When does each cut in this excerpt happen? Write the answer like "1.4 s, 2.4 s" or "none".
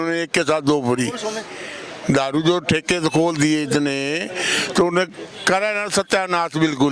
none